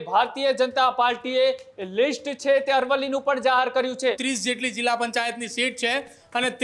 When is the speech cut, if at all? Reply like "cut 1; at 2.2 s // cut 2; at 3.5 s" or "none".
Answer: cut 1; at 4.2 s